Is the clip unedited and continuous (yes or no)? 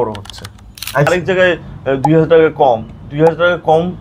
no